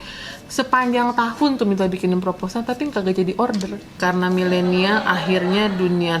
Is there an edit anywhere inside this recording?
yes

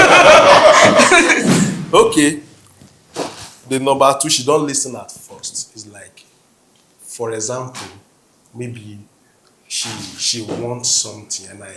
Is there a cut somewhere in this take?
yes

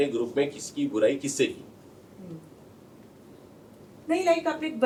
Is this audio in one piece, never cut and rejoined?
yes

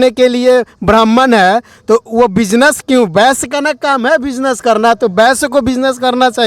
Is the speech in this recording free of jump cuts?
yes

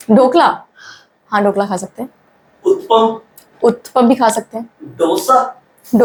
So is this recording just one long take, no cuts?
yes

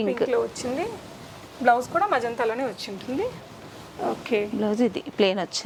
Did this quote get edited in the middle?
no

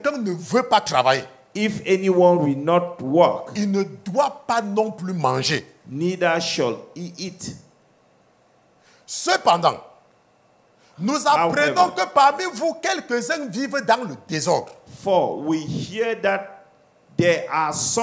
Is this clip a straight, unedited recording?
yes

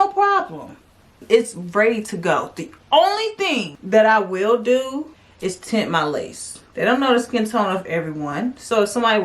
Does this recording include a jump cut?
yes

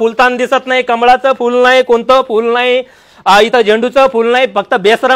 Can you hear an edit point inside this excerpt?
no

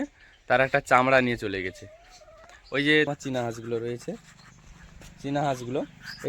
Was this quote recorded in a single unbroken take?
no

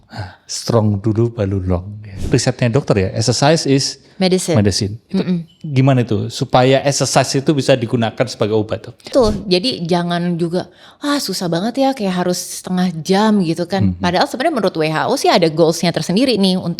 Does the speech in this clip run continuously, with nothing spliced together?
no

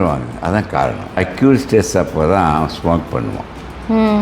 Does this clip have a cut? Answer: yes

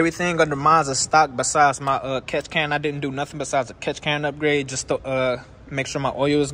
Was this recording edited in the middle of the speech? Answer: no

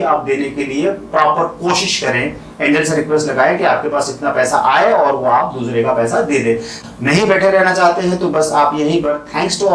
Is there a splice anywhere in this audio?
yes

